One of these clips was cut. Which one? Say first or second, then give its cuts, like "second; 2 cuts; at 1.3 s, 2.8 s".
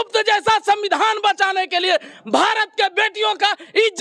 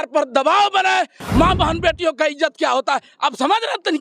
second; 1 cut; at 1.2 s